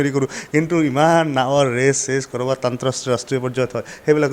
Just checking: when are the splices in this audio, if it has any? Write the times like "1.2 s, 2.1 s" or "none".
none